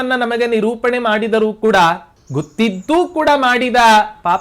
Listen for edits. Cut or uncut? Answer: cut